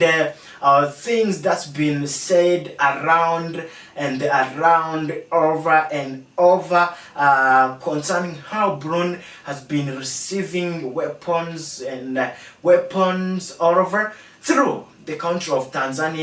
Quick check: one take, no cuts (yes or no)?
yes